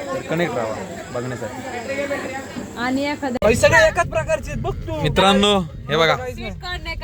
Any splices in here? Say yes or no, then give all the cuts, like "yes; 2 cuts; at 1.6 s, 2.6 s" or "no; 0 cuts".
no; 0 cuts